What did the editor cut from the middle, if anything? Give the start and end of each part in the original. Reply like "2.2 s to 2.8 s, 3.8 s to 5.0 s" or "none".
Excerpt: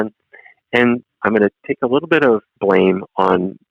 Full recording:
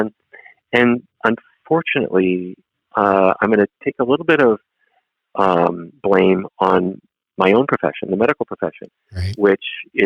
1.2 s to 3.4 s, 4.7 s to 5.9 s